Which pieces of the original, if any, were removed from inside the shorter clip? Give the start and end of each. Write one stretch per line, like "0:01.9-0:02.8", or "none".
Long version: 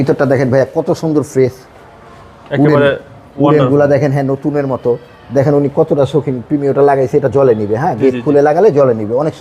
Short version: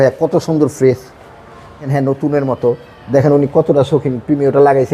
0:02.5-0:04.1